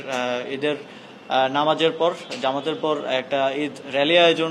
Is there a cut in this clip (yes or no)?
no